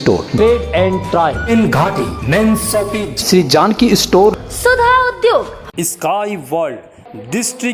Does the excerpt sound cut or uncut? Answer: cut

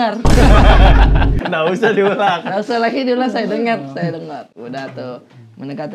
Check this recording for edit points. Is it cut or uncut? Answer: uncut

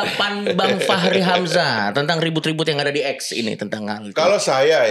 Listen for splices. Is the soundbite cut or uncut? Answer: uncut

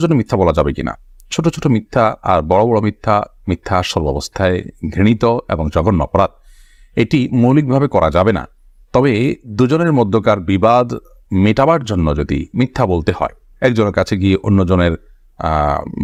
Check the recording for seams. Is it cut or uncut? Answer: uncut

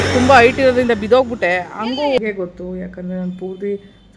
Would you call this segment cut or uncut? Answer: cut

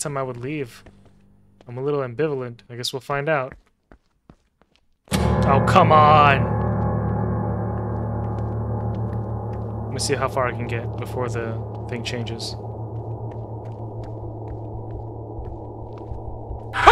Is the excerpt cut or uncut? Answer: cut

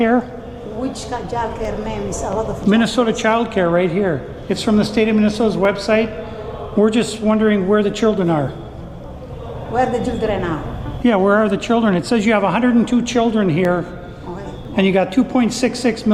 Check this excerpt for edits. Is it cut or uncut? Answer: uncut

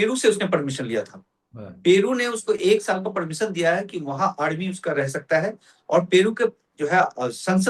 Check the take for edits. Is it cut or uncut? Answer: uncut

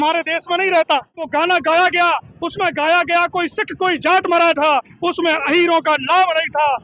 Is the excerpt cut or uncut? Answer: cut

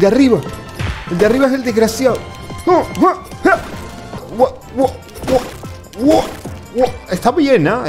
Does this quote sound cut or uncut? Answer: cut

